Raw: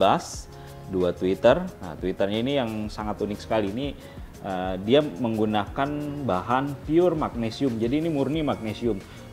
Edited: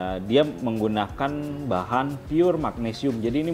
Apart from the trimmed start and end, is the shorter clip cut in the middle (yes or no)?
no